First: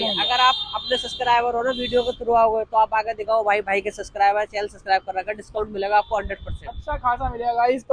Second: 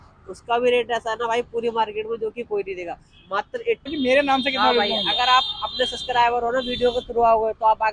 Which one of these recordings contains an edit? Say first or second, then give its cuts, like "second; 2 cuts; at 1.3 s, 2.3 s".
second; 1 cut; at 3.9 s